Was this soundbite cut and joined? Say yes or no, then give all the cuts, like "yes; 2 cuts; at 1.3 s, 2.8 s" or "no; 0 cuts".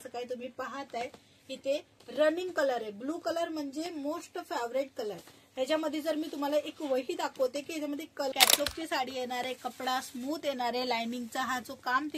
yes; 1 cut; at 8.3 s